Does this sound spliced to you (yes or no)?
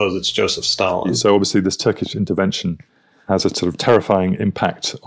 yes